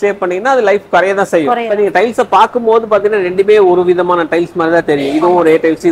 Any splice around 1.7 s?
yes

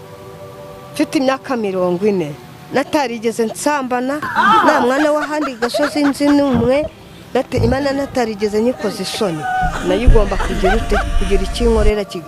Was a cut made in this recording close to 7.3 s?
no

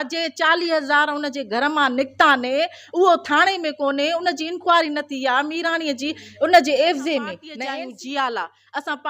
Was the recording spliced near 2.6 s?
no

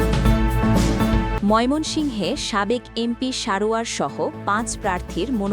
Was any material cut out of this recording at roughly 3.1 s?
no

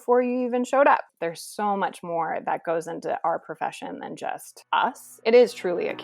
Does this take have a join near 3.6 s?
no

